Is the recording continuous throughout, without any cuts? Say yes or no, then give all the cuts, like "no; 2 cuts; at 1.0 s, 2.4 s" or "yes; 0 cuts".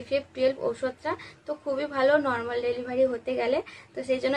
yes; 0 cuts